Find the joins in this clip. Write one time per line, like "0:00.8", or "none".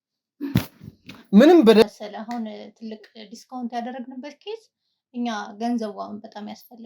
0:01.8